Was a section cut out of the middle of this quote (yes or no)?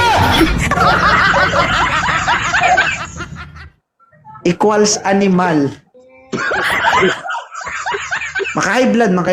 no